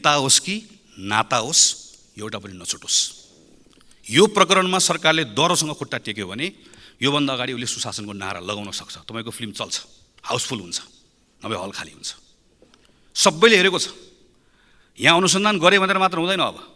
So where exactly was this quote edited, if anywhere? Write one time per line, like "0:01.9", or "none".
none

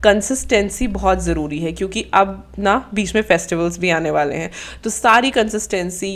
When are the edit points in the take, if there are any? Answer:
none

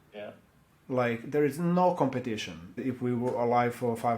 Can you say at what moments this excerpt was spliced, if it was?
0:02.8

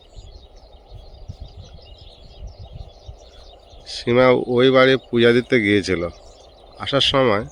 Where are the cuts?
none

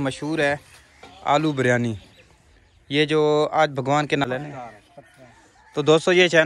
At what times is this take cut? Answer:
0:04.3

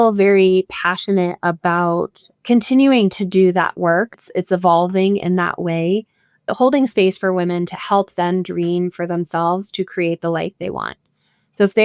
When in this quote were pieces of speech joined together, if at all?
0:02.2
0:04.1
0:06.5

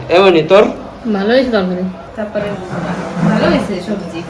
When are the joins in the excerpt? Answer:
0:02.0

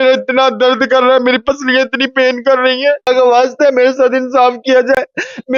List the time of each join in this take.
0:03.1

